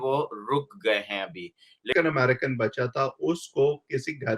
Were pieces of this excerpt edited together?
yes; 1 cut; at 1.9 s

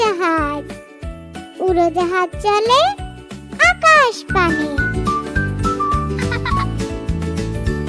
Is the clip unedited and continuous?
no; 1 cut; at 4.7 s

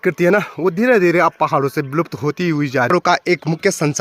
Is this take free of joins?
no; 1 cut; at 2.9 s

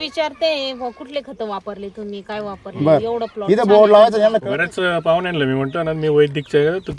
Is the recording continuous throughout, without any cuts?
yes; 0 cuts

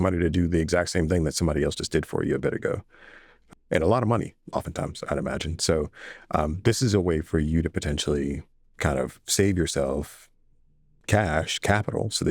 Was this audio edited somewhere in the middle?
yes; 1 cut; at 11.0 s

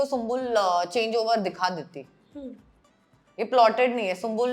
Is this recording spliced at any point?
no; 0 cuts

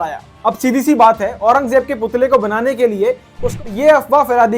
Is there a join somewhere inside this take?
yes; 1 cut; at 3.6 s

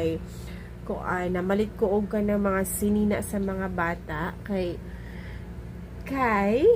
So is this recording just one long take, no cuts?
yes; 0 cuts

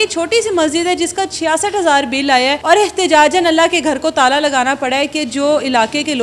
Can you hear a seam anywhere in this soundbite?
yes; 1 cut; at 2.6 s

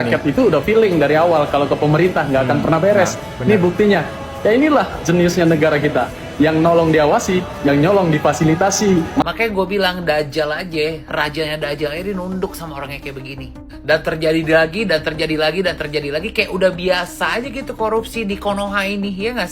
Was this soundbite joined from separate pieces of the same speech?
yes; 1 cut; at 9.2 s

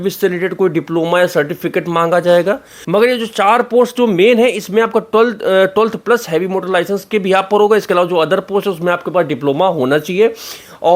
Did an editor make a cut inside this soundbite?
yes; 1 cut; at 2.8 s

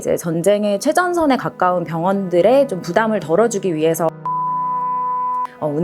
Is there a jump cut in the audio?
no; 0 cuts

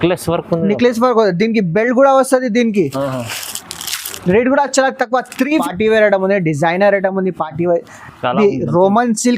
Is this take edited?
yes; 1 cut; at 5.6 s

